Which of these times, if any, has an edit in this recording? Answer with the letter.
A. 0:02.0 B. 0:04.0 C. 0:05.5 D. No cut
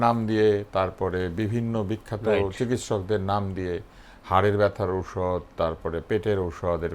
D